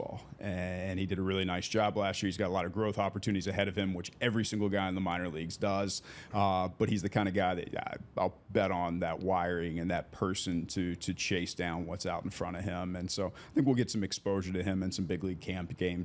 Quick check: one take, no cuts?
yes; 0 cuts

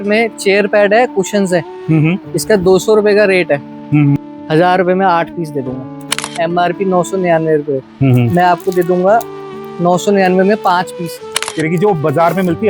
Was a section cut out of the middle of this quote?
yes; 3 cuts; at 4.2 s, 6.1 s, 11.2 s

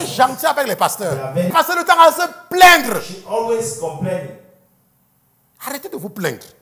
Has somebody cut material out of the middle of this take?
yes; 1 cut; at 1.5 s

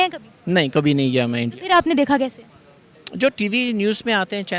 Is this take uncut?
yes; 0 cuts

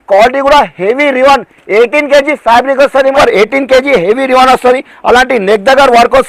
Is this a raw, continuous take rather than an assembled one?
no; 1 cut; at 3.1 s

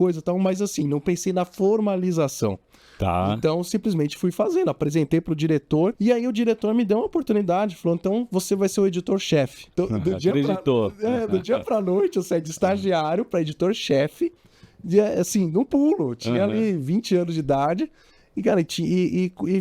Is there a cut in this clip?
yes; 2 cuts; at 6.0 s, 9.7 s

